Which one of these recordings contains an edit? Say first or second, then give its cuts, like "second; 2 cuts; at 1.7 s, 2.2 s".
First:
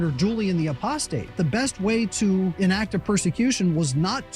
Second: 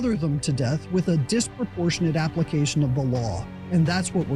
first; 2 cuts; at 1.4 s, 2.5 s